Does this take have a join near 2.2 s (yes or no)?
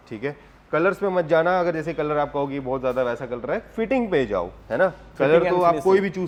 no